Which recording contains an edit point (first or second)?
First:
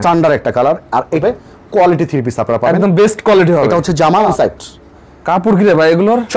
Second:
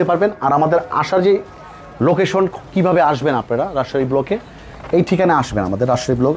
first